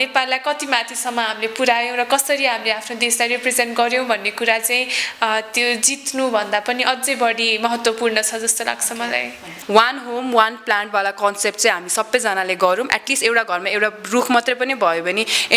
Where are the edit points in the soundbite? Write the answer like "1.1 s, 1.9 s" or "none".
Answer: 9.5 s